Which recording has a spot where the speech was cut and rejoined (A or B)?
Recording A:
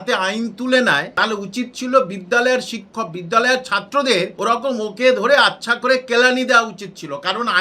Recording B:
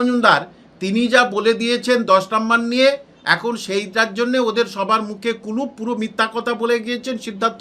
A